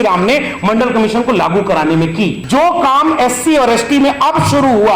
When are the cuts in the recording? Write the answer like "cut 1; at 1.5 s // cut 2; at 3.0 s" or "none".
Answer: cut 1; at 2.4 s